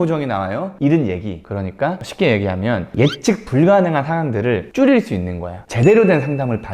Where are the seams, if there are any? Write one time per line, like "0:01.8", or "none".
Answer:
0:05.7